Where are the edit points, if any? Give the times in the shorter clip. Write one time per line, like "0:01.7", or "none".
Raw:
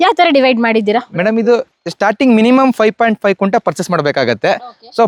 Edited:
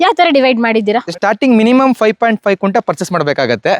0:01.1